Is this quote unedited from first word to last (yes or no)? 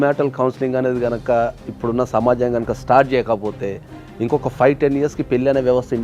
yes